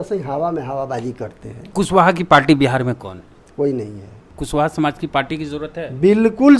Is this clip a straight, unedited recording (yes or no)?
no